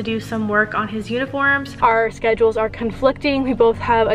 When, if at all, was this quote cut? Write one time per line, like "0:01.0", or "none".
0:01.6